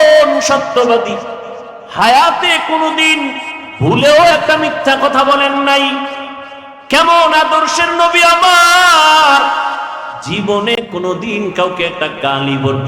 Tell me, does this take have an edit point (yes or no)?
no